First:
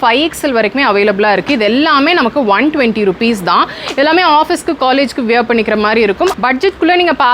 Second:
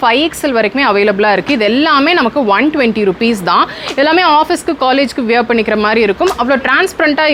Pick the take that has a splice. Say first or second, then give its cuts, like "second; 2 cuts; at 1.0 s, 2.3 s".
first; 1 cut; at 6.4 s